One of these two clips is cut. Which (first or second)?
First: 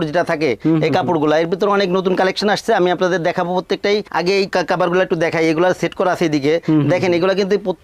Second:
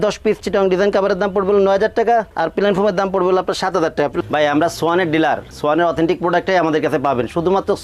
second